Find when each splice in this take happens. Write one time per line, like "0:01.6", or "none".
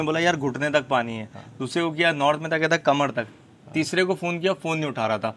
none